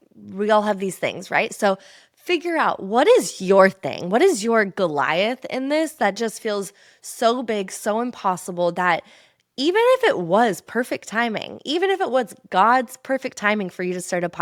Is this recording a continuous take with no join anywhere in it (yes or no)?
yes